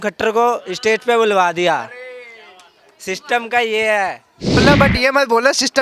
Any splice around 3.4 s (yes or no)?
no